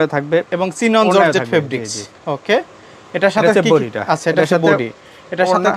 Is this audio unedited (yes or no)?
yes